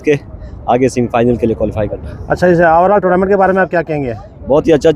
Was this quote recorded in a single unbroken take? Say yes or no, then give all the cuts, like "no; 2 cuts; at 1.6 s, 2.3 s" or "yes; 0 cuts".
yes; 0 cuts